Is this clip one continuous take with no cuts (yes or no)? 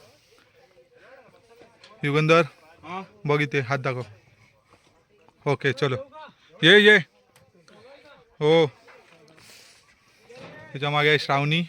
yes